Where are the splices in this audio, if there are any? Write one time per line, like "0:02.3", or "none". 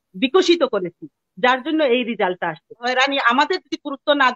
0:02.8